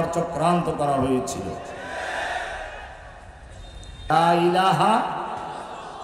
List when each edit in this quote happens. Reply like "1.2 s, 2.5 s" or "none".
4.1 s